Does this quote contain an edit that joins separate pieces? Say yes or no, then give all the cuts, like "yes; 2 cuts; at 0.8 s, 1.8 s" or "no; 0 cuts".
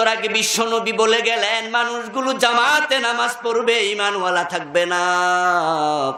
no; 0 cuts